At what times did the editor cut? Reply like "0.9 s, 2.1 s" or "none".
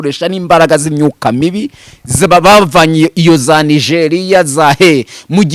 none